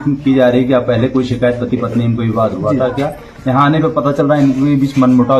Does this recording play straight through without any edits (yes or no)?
yes